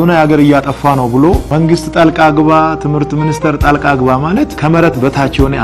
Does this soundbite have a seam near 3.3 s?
no; 2 cuts; at 1.5 s, 4.5 s

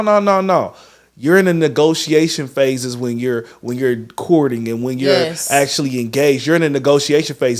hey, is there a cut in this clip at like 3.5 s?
no; 0 cuts

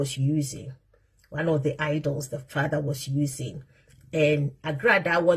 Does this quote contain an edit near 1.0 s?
no; 0 cuts

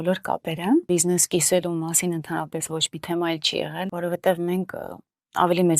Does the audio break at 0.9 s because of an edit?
yes; 2 cuts; at 0.9 s, 3.9 s

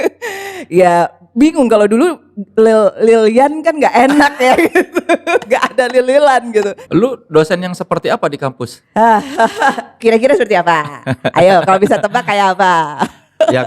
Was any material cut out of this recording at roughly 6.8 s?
yes; 1 cut; at 6.8 s

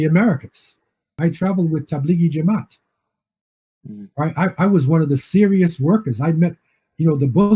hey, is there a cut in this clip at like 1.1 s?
yes; 1 cut; at 1.1 s

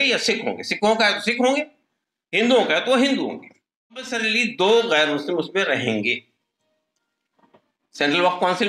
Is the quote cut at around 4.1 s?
yes; 1 cut; at 4.1 s

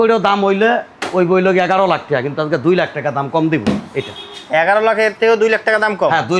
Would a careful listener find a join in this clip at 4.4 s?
no; 0 cuts

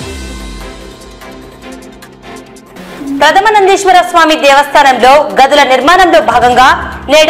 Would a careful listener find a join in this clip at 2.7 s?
no; 0 cuts

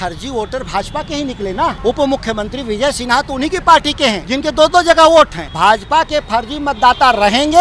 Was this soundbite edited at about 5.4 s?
yes; 3 cuts; at 1.8 s, 4.3 s, 5.4 s

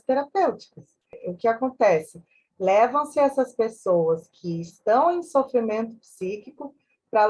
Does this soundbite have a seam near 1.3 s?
yes; 1 cut; at 1.3 s

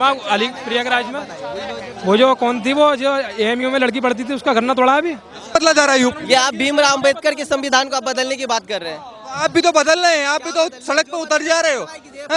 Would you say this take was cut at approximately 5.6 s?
yes; 1 cut; at 5.6 s

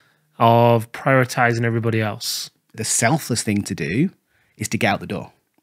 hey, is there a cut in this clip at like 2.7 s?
yes; 1 cut; at 2.7 s

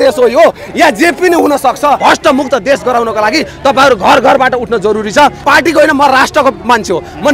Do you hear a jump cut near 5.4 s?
yes; 2 cuts; at 2.0 s, 5.4 s

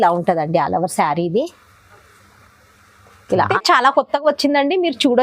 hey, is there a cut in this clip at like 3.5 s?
yes; 1 cut; at 3.5 s

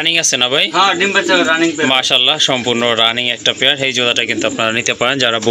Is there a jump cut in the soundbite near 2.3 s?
no; 0 cuts

